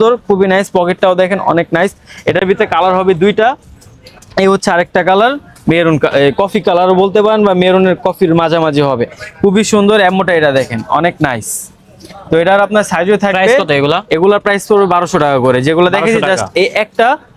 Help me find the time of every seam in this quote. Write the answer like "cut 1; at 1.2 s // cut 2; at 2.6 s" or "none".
none